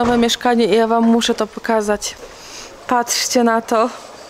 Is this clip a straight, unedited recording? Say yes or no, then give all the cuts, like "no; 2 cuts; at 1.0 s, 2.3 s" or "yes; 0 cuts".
yes; 0 cuts